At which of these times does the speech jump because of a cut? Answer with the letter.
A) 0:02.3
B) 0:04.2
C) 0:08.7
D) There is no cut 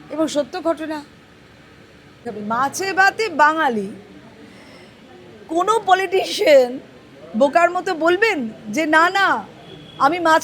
A